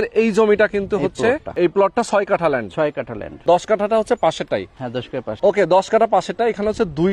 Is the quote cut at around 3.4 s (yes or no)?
yes